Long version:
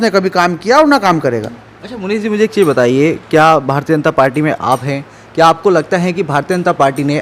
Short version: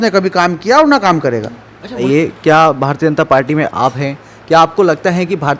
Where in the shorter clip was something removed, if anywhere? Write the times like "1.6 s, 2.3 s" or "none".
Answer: 2.0 s